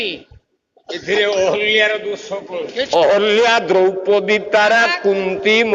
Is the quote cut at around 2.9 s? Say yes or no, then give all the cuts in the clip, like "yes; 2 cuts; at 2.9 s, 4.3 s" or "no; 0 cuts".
yes; 1 cut; at 2.9 s